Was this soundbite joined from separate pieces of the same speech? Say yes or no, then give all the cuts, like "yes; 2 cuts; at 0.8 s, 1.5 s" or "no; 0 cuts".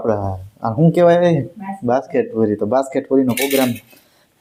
no; 0 cuts